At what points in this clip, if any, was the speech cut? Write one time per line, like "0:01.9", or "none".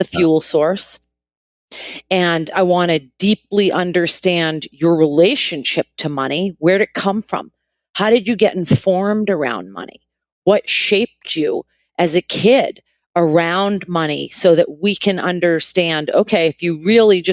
none